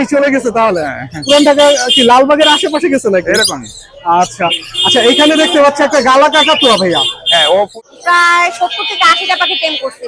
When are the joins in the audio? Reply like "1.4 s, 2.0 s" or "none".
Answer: 7.7 s